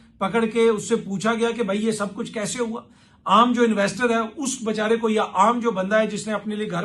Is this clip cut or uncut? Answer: uncut